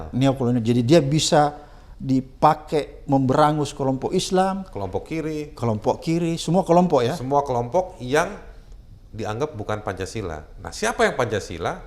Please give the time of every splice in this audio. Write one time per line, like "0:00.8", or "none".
none